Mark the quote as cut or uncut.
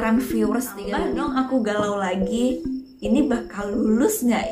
cut